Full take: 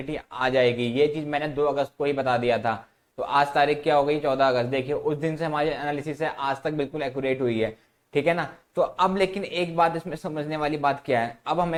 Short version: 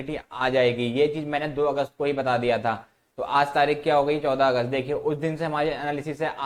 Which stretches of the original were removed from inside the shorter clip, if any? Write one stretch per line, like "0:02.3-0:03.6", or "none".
none